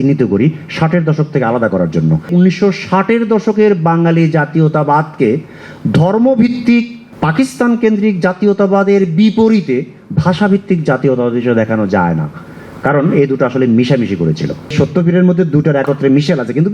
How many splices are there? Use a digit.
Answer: 2